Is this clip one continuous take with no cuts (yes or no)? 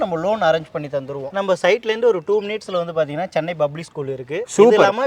no